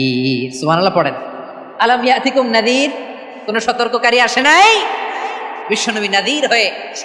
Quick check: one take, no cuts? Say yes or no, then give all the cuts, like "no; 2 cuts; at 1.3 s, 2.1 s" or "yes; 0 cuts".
yes; 0 cuts